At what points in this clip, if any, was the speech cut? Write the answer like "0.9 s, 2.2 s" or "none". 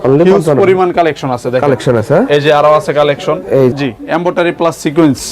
3.7 s